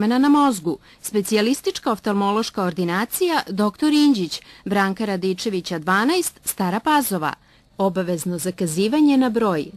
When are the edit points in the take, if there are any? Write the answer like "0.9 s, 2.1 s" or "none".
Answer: none